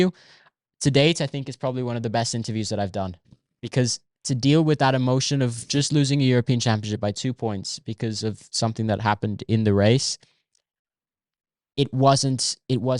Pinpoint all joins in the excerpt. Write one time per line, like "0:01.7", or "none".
none